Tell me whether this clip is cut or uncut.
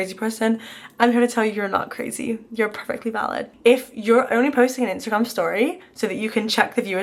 cut